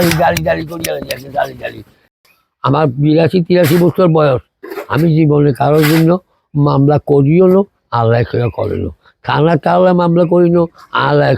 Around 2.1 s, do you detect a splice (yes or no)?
yes